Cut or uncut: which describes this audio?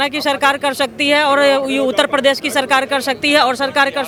uncut